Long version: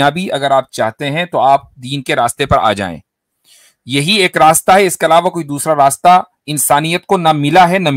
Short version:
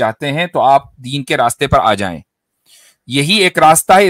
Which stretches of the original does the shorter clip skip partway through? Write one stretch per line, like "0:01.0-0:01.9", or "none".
none

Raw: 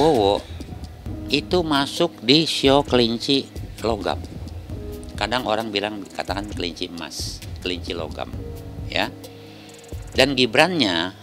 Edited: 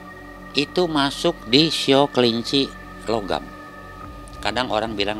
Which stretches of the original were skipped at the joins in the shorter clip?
none

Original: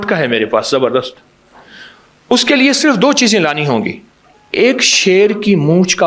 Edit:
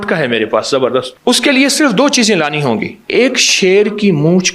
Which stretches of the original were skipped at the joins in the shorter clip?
0:01.1-0:02.2
0:04.0-0:04.4

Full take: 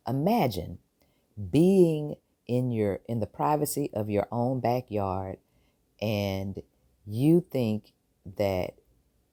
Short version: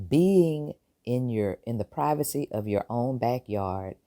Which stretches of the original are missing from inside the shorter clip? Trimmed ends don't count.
none

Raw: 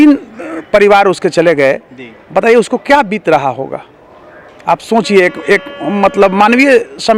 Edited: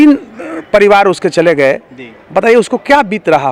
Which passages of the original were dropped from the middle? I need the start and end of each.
none

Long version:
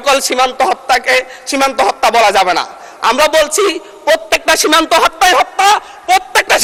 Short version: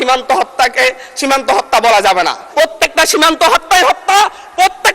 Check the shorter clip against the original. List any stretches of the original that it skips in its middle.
0:02.7-0:03.9

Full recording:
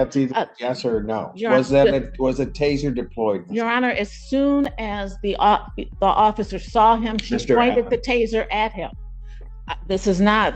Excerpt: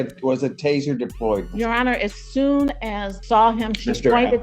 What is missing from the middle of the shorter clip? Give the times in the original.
0:05.1-0:06.6

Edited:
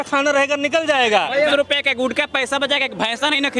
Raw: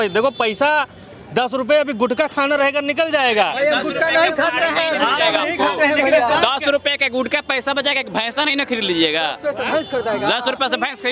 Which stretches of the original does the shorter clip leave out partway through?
0:03.7-0:06.6

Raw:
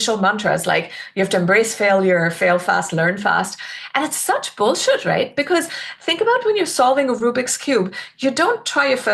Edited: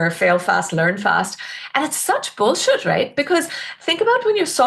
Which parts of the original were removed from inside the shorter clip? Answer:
none

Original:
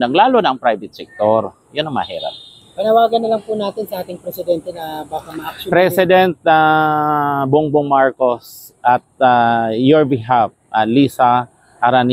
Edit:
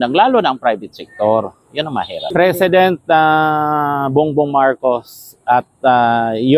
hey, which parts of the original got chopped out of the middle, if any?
0:02.2-0:05.6

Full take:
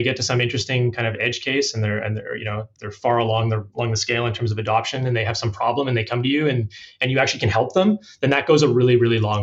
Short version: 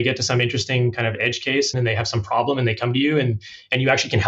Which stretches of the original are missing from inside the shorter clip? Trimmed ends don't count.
0:01.7-0:05.0

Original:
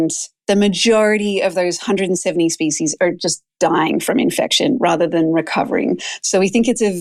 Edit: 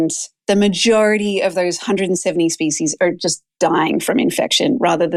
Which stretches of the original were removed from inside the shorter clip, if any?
none

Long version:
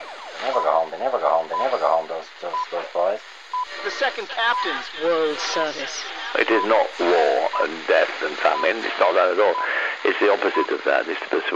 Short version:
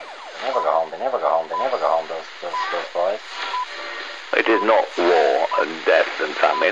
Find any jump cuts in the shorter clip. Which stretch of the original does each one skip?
0:03.8-0:05.9

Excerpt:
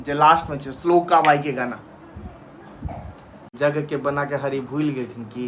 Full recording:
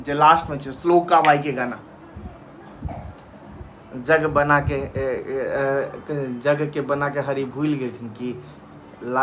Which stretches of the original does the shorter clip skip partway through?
0:03.5-0:06.4

